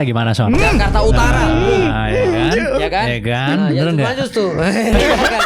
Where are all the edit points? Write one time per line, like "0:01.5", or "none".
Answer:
none